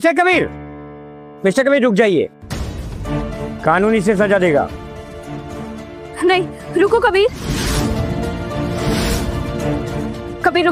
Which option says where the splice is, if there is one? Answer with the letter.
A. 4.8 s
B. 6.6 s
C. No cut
C